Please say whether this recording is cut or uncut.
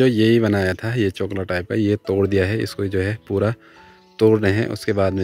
uncut